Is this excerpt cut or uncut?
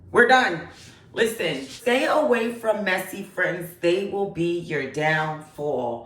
cut